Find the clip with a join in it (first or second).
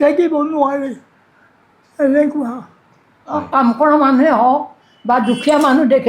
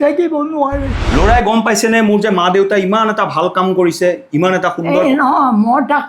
second